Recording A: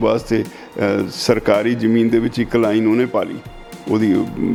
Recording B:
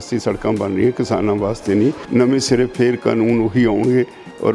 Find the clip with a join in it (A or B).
B